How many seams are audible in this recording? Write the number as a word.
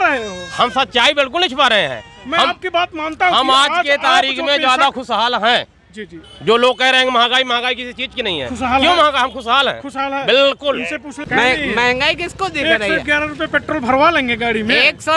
one